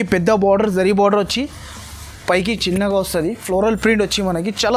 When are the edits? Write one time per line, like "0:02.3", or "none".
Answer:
none